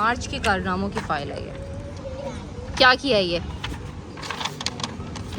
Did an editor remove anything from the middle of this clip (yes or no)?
no